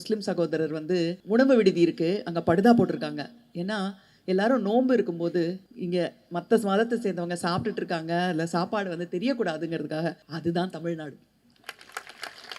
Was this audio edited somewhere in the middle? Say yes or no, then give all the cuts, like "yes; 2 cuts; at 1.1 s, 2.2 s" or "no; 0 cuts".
yes; 3 cuts; at 1.2 s, 5.7 s, 10.3 s